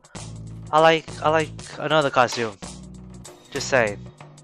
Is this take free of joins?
yes; 0 cuts

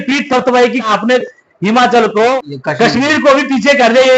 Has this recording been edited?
yes; 2 cuts; at 0.9 s, 2.4 s

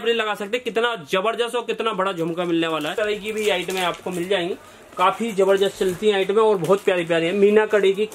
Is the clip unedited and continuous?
no; 1 cut; at 2.9 s

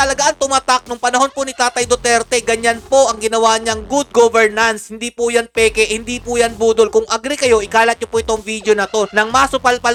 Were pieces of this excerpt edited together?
no; 0 cuts

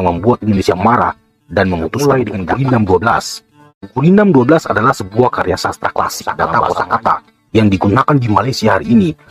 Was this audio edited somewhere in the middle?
yes; 2 cuts; at 2.0 s, 6.5 s

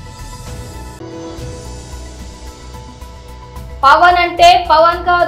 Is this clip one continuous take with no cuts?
yes; 0 cuts

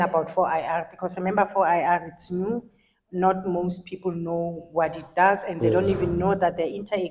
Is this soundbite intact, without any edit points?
yes; 0 cuts

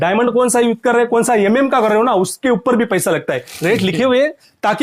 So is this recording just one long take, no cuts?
no; 1 cut; at 3.4 s

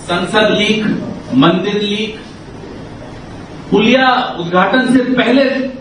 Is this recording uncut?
yes; 0 cuts

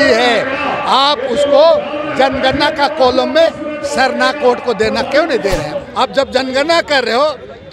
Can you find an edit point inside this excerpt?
yes; 1 cut; at 5.7 s

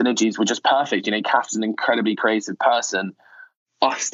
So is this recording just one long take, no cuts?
yes; 0 cuts

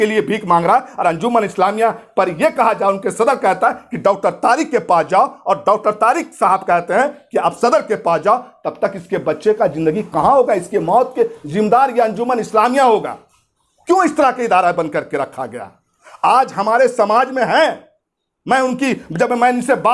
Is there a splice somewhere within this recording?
no; 0 cuts

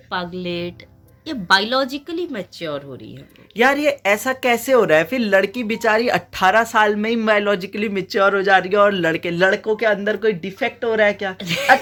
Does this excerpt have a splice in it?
no; 0 cuts

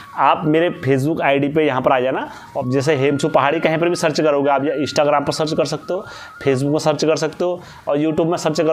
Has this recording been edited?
no; 0 cuts

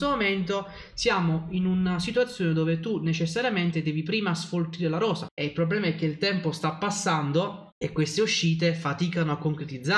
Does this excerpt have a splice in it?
yes; 2 cuts; at 5.2 s, 7.7 s

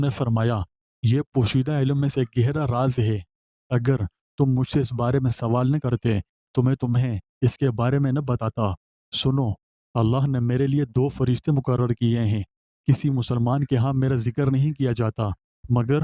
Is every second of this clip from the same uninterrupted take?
yes; 0 cuts

